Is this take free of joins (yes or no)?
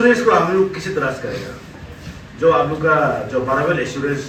yes